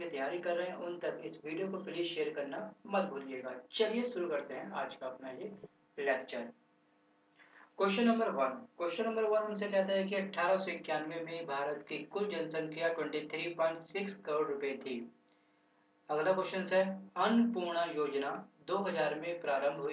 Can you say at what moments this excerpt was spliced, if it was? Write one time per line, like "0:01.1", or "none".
0:02.3